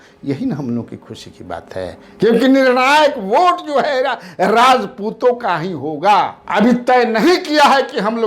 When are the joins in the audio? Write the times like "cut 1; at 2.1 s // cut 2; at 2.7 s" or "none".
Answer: cut 1; at 2.0 s // cut 2; at 6.4 s